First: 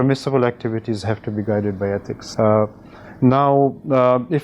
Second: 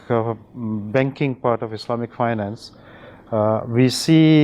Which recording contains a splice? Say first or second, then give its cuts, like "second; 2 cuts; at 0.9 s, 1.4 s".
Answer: first; 1 cut; at 2.2 s